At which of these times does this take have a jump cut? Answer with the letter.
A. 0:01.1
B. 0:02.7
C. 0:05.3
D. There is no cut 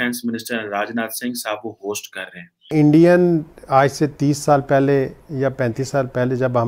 B